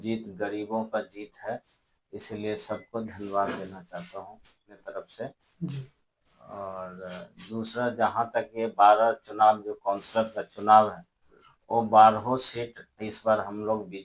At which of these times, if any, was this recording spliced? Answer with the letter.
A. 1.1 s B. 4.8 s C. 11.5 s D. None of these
B